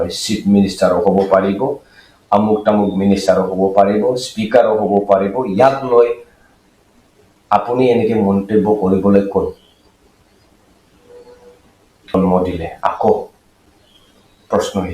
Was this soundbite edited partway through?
yes; 1 cut; at 12.1 s

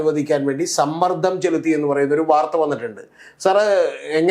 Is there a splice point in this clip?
no; 0 cuts

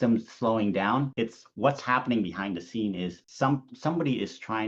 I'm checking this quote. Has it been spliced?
no; 0 cuts

